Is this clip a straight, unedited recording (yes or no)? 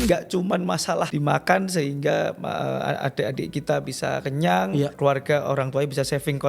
no